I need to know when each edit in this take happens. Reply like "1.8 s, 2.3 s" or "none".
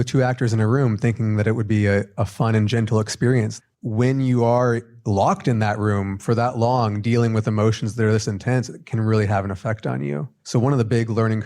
3.5 s, 4.9 s, 10.3 s